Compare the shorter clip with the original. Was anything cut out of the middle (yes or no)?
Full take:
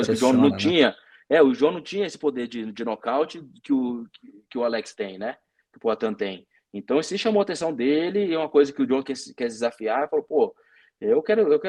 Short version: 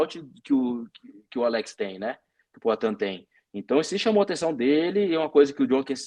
no